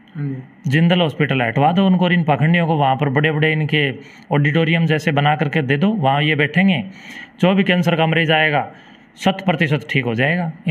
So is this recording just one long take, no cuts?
yes; 0 cuts

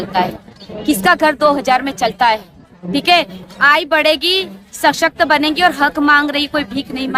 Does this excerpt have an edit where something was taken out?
no; 0 cuts

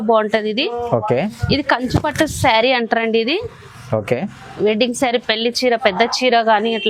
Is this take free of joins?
yes; 0 cuts

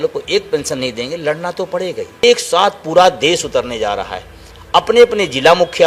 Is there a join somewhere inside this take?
yes; 1 cut; at 2.2 s

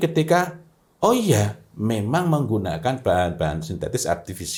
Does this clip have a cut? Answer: no; 0 cuts

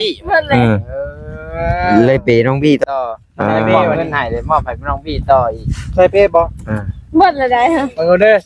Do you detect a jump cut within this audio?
no; 0 cuts

